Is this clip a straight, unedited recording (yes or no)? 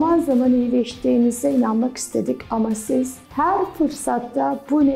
yes